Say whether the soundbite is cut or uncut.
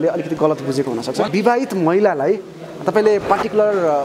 cut